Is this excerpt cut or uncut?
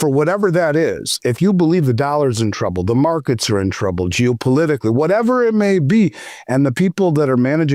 uncut